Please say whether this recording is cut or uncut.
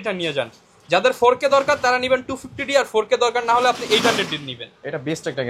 uncut